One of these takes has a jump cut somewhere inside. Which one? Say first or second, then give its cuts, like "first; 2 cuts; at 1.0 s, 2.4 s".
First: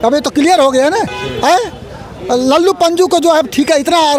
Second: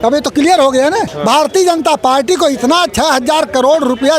second; 1 cut; at 1.1 s